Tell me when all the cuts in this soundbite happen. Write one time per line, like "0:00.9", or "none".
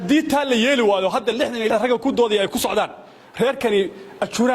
0:01.7